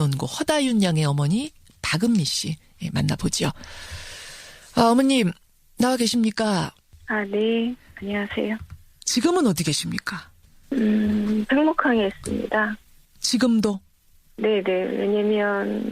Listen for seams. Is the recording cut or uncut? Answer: cut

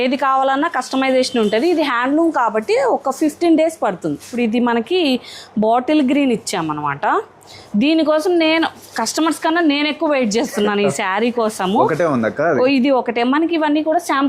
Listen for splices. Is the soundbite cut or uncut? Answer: cut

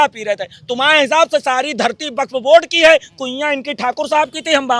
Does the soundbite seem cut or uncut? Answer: uncut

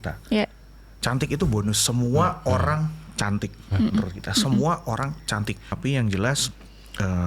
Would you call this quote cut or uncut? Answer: cut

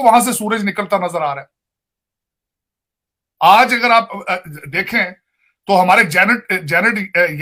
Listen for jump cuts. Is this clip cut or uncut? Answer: uncut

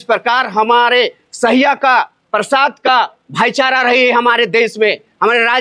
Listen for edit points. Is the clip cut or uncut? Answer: uncut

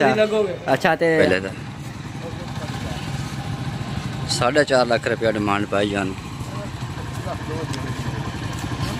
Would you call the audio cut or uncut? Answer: cut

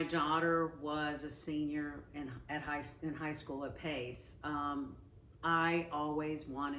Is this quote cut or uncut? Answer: uncut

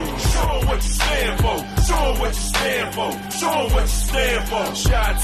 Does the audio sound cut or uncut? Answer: uncut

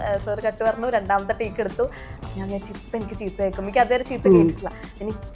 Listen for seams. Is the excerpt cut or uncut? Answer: cut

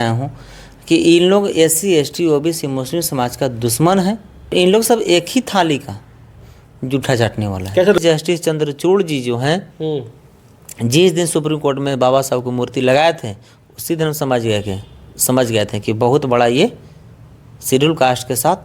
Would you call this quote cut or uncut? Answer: cut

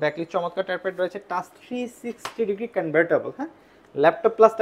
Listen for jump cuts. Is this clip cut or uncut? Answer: uncut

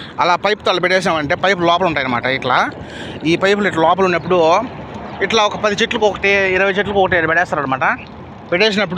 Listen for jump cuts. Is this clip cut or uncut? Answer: uncut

